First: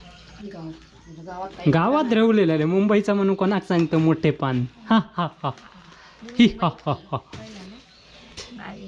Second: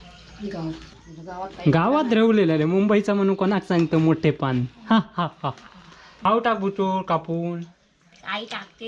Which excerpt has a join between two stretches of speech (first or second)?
second